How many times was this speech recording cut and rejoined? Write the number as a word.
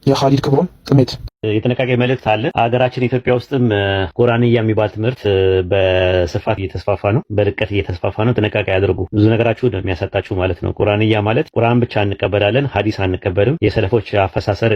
zero